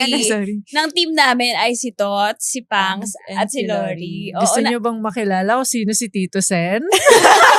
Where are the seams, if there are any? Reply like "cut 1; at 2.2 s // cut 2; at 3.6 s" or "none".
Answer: none